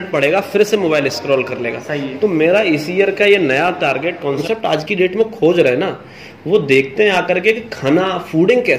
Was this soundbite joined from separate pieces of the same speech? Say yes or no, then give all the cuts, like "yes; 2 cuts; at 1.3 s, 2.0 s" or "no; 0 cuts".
yes; 1 cut; at 4.4 s